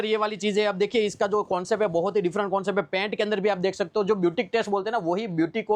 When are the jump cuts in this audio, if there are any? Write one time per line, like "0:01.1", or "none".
none

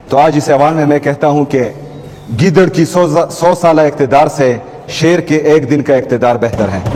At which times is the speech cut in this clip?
none

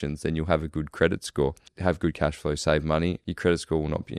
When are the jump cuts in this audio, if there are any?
0:01.7
0:03.3

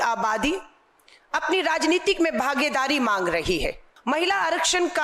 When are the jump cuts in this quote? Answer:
0:03.9

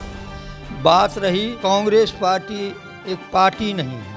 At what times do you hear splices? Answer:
0:01.5

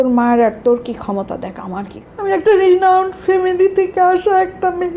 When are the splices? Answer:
0:02.0

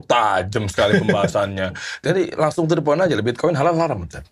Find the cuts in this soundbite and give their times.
0:02.0

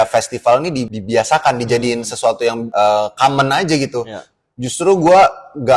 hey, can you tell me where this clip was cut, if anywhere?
0:00.9
0:02.6

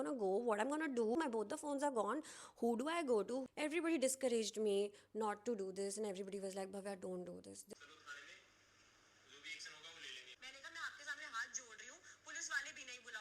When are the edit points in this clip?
0:01.2
0:03.4
0:07.6

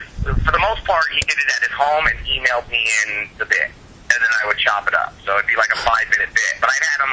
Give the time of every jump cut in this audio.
0:03.9

